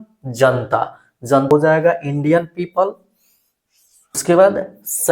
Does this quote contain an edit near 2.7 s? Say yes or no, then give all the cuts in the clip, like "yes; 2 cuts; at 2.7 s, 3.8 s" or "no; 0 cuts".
no; 2 cuts; at 1.5 s, 4.2 s